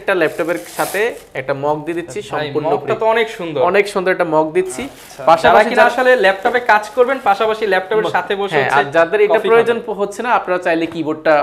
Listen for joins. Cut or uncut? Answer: uncut